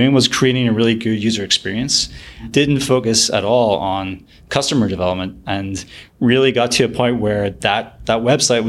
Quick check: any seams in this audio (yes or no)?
yes